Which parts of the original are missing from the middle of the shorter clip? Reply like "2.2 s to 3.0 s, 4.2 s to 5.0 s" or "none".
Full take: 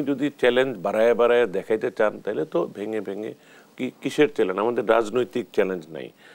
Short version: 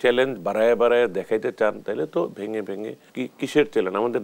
3.4 s to 3.6 s